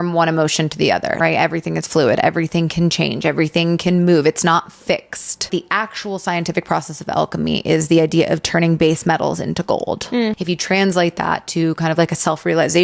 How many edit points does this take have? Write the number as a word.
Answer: three